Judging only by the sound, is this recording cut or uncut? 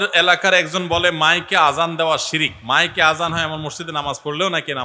cut